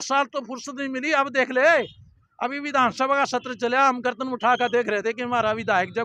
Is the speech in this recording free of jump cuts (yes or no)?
yes